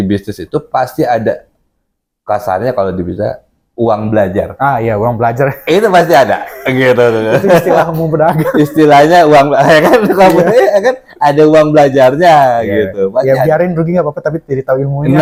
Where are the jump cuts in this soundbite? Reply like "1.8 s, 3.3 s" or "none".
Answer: none